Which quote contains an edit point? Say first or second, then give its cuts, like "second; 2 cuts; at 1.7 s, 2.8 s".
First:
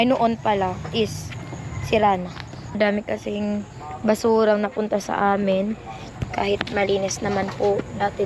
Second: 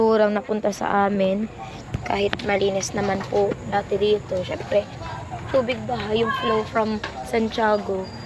first; 1 cut; at 2.8 s